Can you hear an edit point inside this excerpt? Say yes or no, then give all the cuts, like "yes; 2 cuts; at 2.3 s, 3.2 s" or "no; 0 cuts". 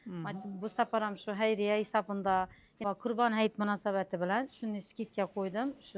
yes; 1 cut; at 2.8 s